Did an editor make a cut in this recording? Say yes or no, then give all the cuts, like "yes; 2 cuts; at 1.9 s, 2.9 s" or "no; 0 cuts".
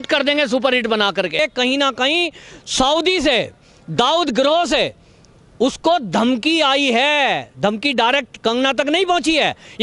yes; 1 cut; at 1.4 s